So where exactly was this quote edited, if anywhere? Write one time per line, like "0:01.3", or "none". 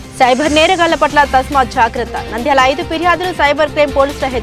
none